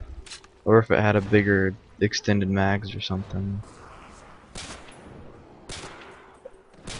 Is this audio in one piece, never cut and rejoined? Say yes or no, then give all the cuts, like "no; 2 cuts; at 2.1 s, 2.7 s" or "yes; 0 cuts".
no; 1 cut; at 3.7 s